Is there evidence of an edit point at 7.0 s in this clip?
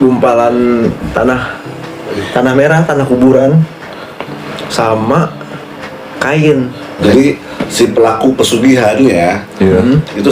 yes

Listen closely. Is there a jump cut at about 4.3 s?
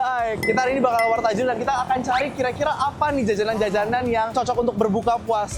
yes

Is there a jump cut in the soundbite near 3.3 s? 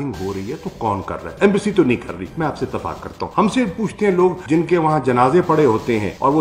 yes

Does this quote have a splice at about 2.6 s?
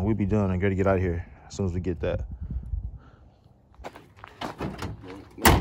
no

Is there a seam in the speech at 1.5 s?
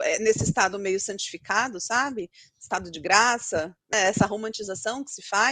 no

